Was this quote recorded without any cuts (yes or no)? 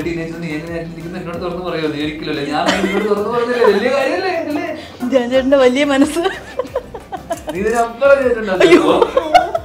yes